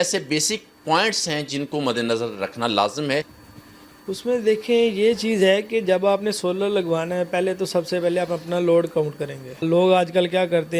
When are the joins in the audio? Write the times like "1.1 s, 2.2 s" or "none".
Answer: 3.4 s, 9.6 s

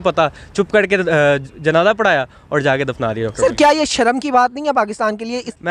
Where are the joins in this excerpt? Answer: none

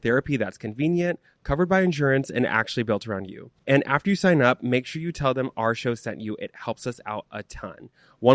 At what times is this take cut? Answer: none

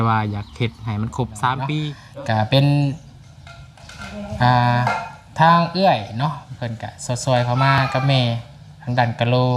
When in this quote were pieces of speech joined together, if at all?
2.0 s

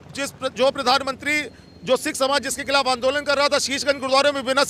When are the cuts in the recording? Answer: none

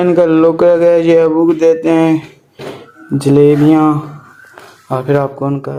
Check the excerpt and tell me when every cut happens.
none

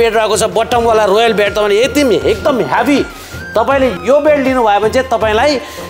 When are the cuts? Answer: 4.0 s

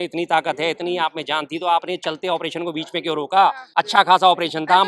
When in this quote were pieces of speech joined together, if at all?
3.6 s

